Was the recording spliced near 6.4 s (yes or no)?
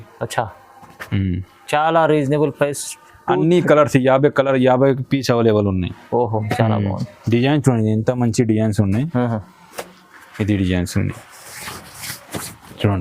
yes